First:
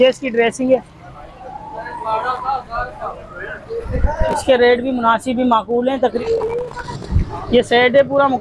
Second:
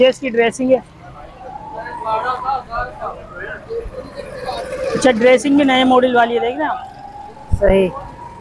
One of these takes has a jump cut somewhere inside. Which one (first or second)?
first